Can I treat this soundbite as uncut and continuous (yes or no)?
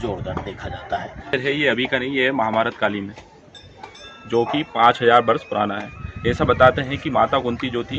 no